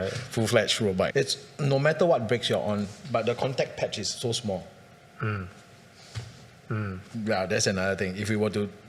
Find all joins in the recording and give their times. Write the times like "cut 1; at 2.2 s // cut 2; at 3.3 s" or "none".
cut 1; at 1.1 s